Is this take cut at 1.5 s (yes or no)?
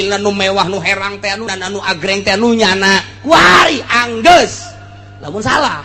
yes